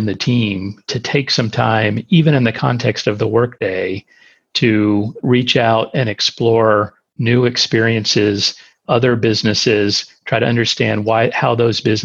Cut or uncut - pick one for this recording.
cut